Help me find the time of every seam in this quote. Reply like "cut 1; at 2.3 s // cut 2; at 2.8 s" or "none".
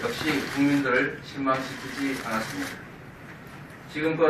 none